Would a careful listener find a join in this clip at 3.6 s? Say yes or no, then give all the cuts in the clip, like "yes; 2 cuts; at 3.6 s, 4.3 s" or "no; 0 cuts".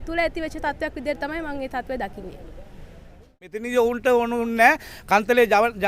yes; 1 cut; at 3.6 s